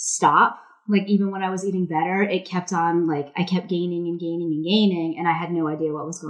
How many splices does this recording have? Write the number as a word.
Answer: zero